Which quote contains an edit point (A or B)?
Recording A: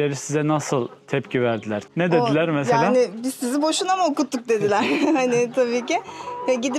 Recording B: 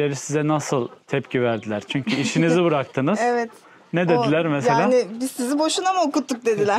A